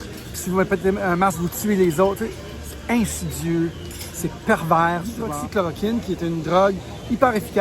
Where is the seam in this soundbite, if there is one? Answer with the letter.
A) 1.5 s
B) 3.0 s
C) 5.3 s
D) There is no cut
C